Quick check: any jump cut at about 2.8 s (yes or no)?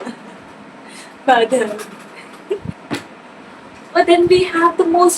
yes